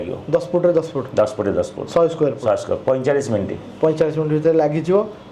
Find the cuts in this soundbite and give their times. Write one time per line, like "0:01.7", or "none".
none